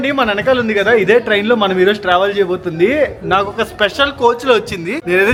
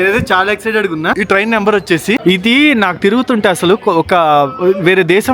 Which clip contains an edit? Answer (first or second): second